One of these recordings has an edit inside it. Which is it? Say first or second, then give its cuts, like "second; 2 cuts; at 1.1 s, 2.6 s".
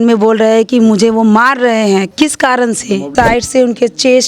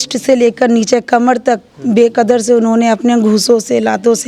first; 2 cuts; at 2.1 s, 3.1 s